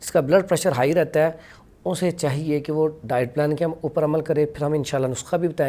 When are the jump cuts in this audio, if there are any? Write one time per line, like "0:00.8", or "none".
none